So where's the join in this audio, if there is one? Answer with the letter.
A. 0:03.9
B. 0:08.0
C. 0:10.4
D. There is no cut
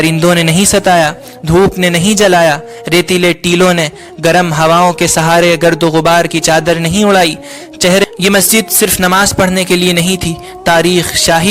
B